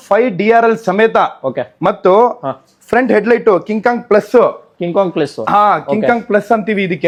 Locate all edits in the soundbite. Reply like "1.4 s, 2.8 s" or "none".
none